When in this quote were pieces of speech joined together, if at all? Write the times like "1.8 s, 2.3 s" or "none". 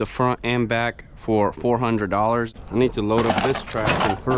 2.5 s